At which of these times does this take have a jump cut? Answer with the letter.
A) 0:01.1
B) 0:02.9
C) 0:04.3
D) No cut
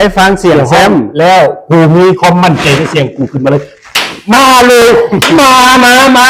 D